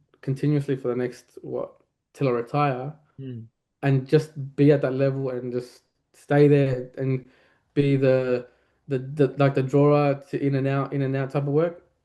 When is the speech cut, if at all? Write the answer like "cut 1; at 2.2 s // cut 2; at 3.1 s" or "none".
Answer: none